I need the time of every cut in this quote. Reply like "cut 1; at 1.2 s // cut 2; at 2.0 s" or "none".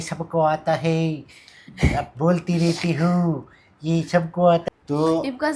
cut 1; at 4.6 s